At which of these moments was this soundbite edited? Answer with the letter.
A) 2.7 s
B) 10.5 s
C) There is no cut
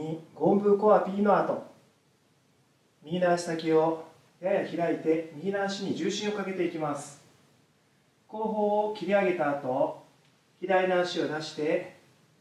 C